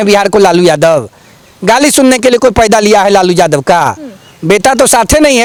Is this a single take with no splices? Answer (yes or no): yes